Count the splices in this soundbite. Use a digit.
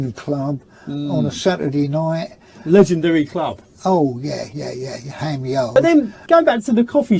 1